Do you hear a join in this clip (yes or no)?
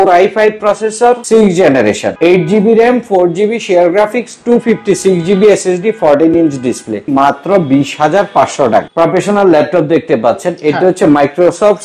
yes